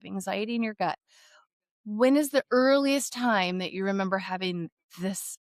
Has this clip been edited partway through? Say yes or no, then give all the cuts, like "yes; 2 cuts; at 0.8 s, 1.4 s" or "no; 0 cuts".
no; 0 cuts